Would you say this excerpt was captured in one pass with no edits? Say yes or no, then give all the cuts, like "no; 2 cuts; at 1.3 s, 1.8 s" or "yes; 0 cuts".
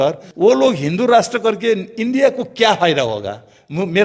yes; 0 cuts